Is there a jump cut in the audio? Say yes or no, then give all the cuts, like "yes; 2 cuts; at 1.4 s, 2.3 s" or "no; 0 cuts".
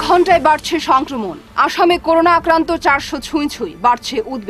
no; 0 cuts